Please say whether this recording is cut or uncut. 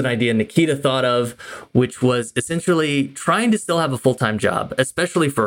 uncut